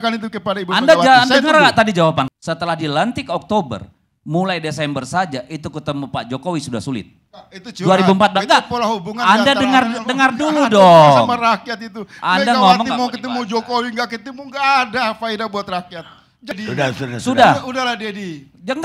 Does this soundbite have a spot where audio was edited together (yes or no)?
yes